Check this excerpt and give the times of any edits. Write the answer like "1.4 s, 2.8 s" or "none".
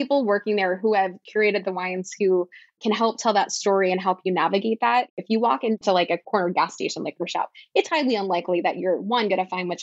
1.2 s, 5.2 s